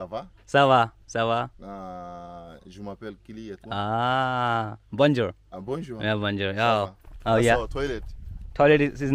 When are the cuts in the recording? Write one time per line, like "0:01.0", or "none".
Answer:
0:07.0